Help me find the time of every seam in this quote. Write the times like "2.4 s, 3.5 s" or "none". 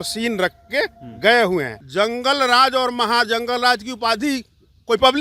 1.8 s